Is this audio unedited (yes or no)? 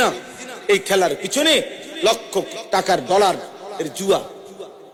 yes